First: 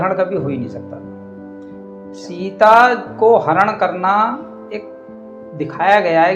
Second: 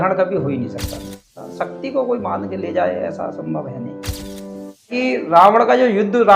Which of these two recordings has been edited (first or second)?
second